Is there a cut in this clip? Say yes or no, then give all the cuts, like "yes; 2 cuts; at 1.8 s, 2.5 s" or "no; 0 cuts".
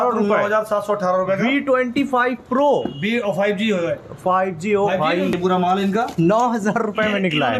yes; 1 cut; at 5.4 s